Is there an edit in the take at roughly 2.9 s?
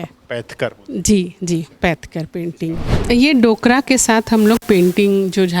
yes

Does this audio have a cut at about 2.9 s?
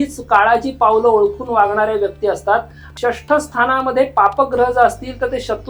yes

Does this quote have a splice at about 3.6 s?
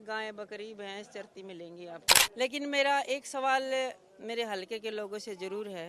no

